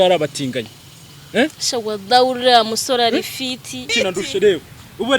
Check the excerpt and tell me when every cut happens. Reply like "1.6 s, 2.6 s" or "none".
3.9 s

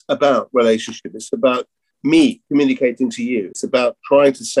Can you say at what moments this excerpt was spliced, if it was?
1.9 s, 3.6 s

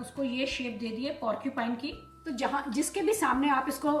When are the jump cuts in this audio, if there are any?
2.1 s

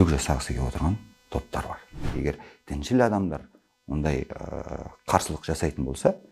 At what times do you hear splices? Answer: 2.1 s

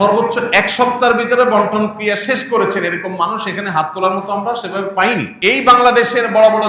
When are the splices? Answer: 5.3 s

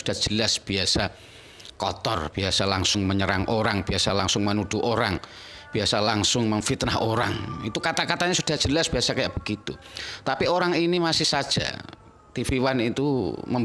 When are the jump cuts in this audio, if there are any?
none

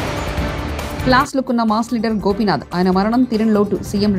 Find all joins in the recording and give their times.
1.0 s

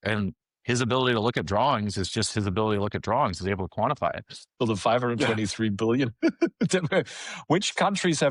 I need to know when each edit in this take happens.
4.5 s

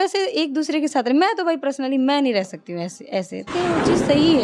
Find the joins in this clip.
3.5 s

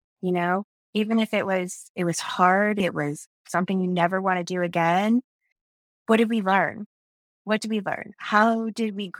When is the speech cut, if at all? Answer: 2.8 s

